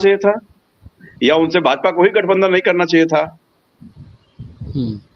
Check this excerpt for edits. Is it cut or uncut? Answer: uncut